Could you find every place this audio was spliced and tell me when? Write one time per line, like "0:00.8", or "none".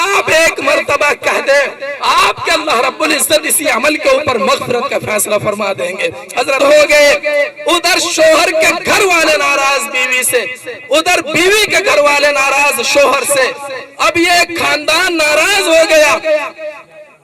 0:06.6